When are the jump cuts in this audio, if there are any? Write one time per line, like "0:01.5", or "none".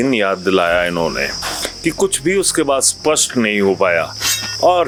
none